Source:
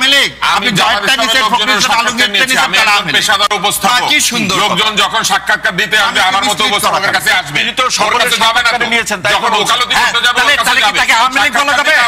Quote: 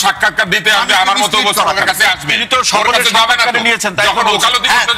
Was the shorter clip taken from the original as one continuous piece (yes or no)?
yes